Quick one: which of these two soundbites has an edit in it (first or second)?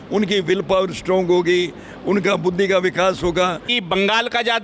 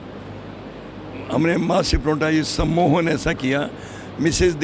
first